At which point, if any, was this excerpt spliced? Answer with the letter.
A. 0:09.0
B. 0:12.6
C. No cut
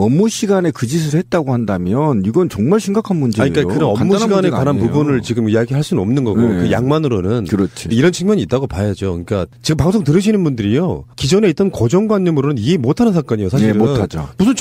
C